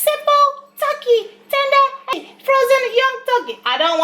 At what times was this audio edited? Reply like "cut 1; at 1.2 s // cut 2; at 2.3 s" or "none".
cut 1; at 2.2 s